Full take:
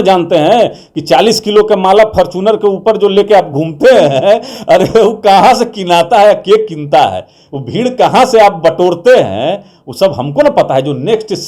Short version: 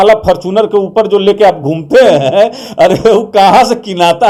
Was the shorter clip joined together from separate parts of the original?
no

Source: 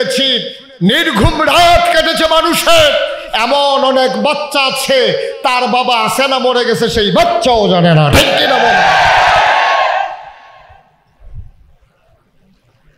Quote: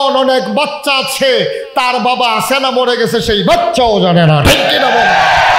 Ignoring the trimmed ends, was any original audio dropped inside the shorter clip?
no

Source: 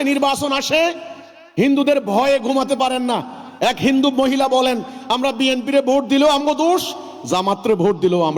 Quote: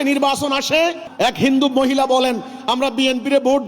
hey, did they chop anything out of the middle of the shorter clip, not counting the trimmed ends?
yes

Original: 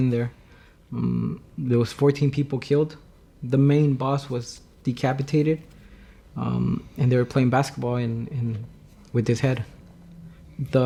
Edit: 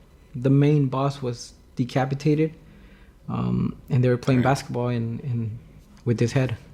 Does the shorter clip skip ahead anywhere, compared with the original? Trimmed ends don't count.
no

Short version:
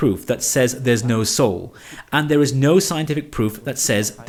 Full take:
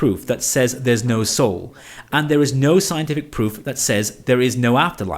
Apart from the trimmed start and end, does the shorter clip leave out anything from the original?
no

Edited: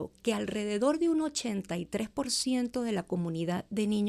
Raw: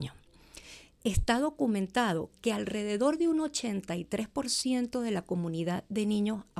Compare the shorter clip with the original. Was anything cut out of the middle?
no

